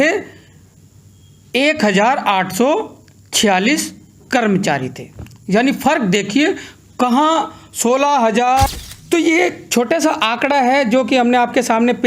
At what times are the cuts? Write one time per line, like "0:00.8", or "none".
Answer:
0:08.7